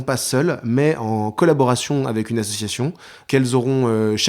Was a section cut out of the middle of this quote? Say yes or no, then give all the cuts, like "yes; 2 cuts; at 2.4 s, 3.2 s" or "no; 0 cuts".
yes; 1 cut; at 3.2 s